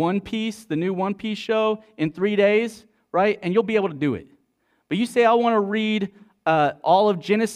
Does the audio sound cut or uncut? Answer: uncut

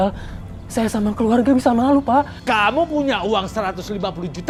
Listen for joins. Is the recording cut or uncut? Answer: uncut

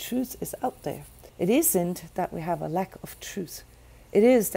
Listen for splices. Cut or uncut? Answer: cut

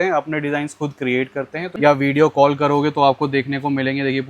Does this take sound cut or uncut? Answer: cut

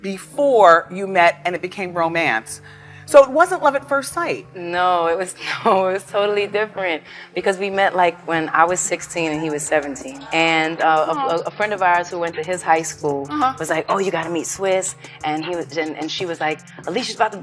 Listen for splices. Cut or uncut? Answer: uncut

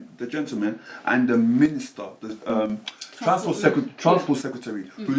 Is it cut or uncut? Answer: uncut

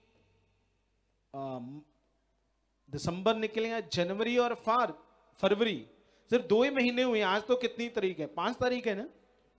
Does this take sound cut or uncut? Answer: uncut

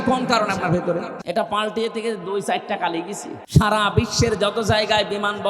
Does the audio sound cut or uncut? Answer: cut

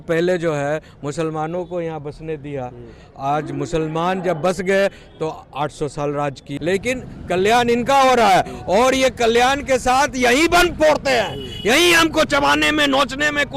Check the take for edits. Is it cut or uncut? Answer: cut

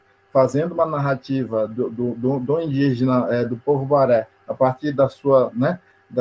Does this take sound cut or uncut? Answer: uncut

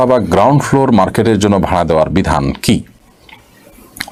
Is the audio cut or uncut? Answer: uncut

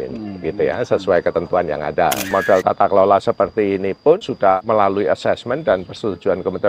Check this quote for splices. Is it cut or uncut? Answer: cut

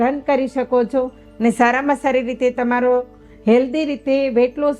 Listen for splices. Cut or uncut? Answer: uncut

